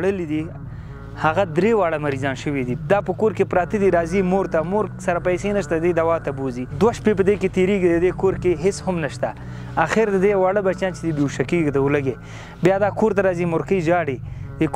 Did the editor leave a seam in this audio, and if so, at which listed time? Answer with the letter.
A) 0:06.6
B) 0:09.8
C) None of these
A